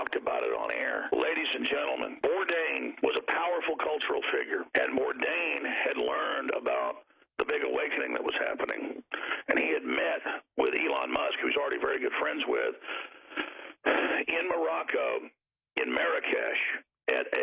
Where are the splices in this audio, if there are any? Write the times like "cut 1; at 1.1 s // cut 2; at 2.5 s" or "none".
cut 1; at 1.0 s // cut 2; at 2.1 s // cut 3; at 2.9 s // cut 4; at 4.7 s